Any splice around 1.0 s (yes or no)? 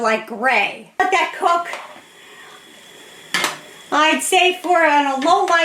yes